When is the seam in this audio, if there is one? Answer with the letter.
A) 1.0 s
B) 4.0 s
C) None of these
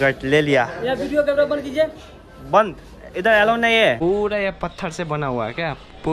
B